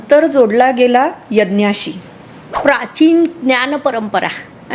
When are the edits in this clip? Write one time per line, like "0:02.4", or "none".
0:02.5